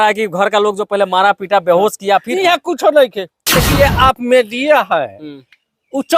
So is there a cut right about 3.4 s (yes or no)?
yes